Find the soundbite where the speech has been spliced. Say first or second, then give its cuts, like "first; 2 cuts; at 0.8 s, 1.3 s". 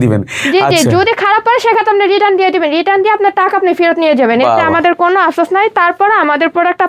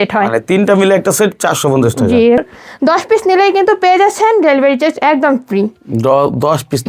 second; 1 cut; at 2.4 s